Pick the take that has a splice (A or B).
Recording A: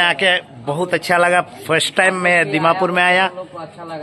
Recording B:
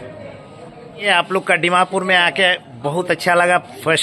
B